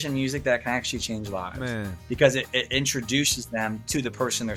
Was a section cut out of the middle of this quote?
no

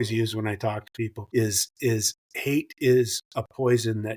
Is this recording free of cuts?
no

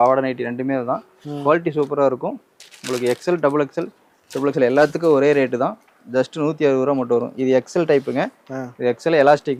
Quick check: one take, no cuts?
yes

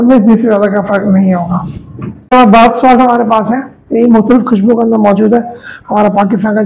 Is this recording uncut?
no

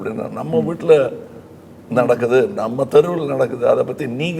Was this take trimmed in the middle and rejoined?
no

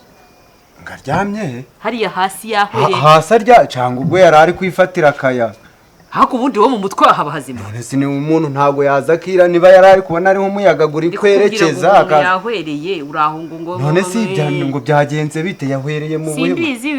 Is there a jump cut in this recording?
no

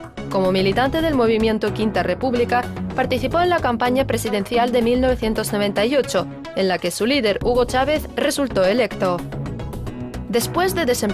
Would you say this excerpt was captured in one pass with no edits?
yes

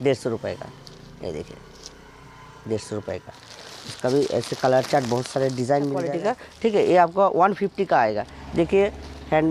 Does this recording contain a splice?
yes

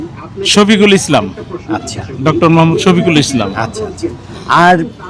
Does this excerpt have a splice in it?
no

